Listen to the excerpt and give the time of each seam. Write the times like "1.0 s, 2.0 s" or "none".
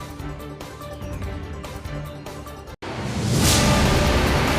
2.4 s